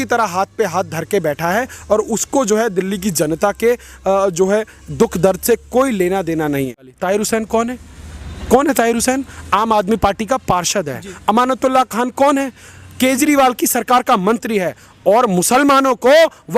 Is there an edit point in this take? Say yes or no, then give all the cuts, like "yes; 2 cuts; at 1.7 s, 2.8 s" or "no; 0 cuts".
yes; 1 cut; at 6.9 s